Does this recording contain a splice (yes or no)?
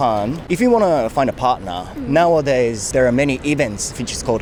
no